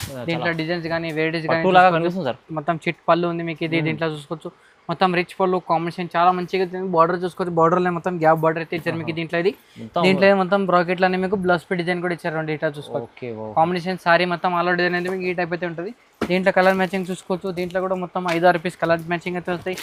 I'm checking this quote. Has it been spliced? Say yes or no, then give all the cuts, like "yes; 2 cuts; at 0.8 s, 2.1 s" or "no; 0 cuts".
no; 0 cuts